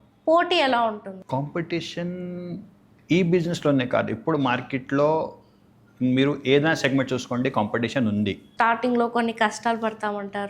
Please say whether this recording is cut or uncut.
cut